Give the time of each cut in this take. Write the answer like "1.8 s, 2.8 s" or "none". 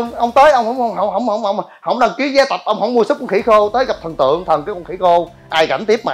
none